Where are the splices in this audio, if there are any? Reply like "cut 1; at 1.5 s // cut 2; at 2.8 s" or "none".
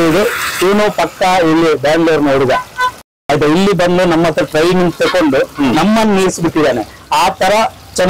none